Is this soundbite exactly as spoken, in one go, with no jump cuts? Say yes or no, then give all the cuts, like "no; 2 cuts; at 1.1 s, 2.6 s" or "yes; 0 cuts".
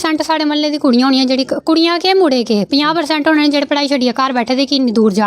yes; 0 cuts